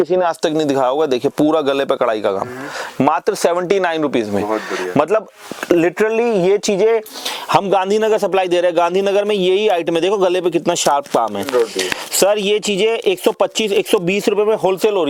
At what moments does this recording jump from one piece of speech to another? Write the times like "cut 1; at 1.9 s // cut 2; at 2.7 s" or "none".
none